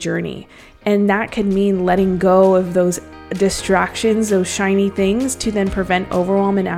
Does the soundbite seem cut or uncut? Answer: uncut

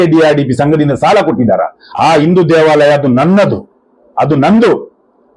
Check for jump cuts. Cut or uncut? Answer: cut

